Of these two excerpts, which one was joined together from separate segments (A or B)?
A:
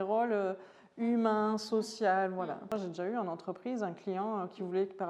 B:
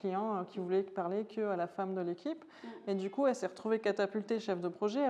A